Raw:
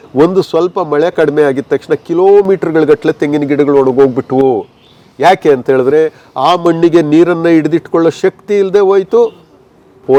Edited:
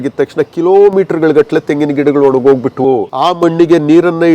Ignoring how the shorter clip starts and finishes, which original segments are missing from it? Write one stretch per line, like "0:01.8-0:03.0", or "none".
0:04.4-0:06.1